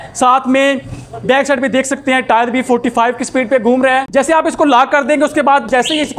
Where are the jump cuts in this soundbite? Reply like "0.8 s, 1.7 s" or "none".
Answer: 4.1 s